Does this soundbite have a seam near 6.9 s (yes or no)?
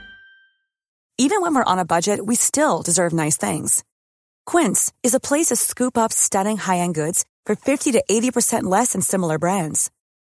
no